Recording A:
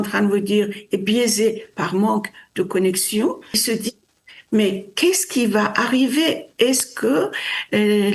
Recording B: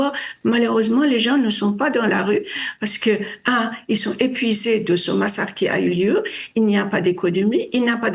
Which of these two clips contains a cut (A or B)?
A